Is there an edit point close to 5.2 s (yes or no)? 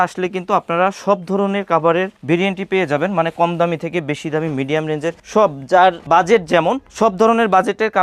no